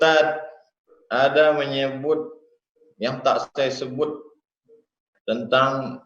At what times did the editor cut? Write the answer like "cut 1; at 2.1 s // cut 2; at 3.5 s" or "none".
cut 1; at 0.9 s